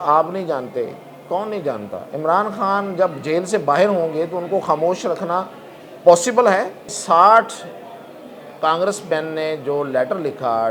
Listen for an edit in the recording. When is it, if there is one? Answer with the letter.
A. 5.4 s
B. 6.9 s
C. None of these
B